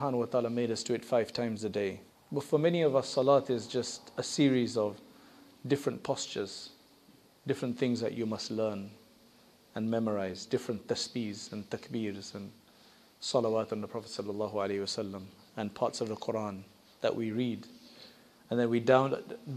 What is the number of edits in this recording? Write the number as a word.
one